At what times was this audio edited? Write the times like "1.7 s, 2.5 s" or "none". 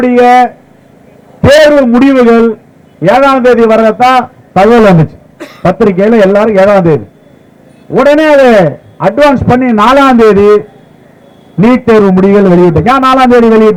none